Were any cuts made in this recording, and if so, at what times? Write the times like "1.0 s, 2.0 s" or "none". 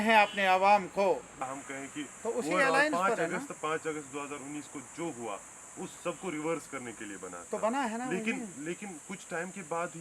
1.3 s